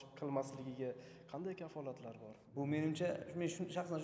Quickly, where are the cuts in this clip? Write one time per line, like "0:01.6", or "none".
0:02.4